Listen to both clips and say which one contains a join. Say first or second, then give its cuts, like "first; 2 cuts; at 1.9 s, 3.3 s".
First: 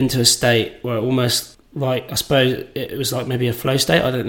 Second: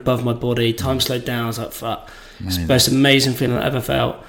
first; 1 cut; at 1.5 s